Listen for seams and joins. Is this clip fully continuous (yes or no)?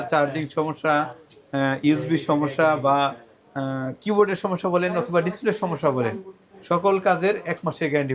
yes